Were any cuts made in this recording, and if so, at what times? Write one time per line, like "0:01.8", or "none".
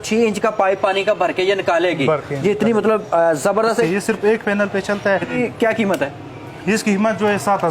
0:03.9
0:05.3